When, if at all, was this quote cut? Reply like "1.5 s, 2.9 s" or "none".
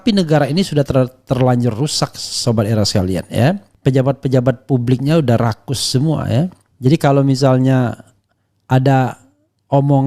6.6 s